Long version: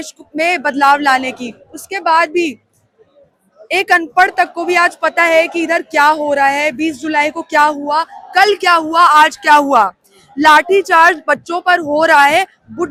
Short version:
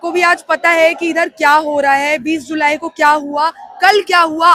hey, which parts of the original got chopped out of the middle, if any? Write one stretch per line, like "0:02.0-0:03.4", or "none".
none